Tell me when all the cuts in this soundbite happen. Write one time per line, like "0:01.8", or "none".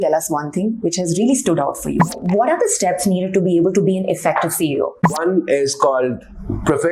0:02.2
0:05.2